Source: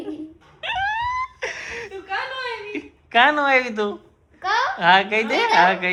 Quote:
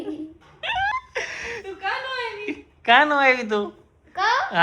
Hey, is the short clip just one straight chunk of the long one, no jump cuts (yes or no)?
no